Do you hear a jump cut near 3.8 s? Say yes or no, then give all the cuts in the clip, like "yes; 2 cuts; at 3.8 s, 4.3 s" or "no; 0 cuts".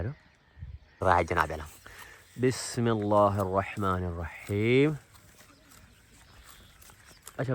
no; 1 cut; at 1.0 s